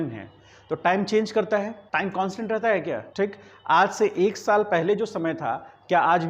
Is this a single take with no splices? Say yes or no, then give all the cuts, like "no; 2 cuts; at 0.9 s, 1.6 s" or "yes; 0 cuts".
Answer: no; 2 cuts; at 1.8 s, 3.1 s